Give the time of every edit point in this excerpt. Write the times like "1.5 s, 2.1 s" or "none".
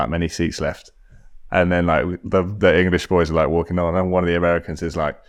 none